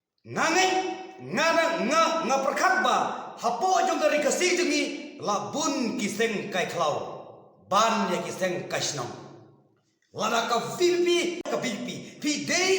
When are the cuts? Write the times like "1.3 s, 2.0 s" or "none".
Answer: 11.5 s

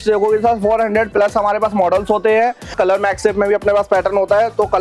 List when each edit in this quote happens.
2.7 s

